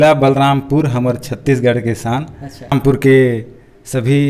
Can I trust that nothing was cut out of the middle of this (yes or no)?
no